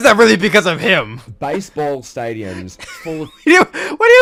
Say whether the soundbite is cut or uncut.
uncut